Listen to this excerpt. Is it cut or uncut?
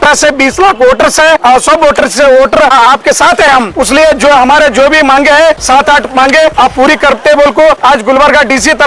cut